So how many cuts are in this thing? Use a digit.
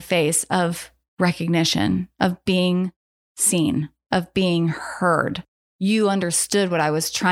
0